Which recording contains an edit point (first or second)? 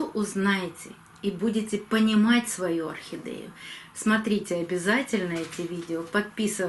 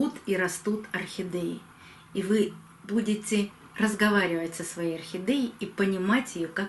second